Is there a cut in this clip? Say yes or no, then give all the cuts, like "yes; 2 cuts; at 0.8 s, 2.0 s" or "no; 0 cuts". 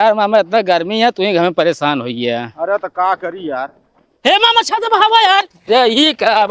no; 0 cuts